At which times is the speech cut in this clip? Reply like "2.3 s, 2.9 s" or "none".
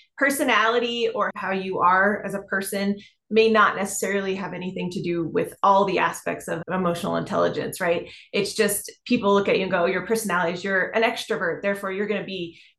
1.3 s, 6.6 s